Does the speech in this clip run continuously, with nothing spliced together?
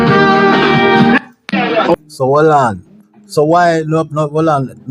no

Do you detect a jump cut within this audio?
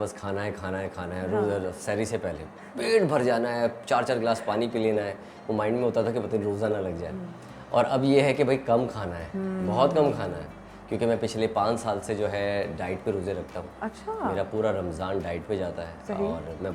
no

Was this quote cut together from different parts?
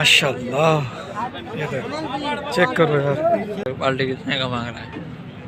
yes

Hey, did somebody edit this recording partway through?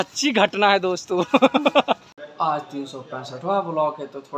yes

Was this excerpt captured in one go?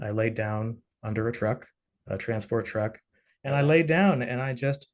no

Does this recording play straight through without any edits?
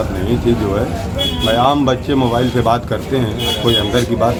yes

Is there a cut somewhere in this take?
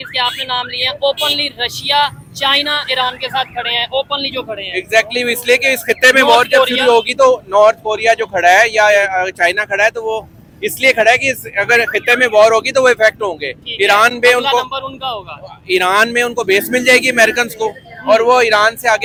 no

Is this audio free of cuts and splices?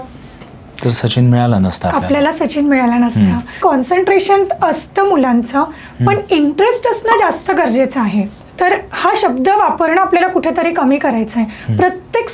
no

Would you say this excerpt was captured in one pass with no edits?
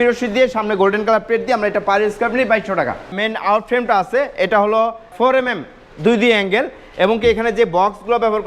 no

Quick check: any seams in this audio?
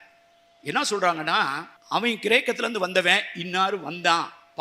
yes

